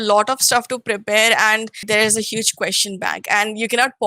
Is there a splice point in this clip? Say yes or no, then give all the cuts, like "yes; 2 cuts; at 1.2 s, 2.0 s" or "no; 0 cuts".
yes; 1 cut; at 1.8 s